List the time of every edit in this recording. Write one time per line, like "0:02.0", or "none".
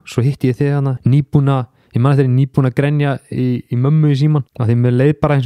0:01.0
0:04.5